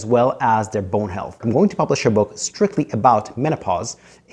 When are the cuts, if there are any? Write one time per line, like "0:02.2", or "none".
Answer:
0:01.4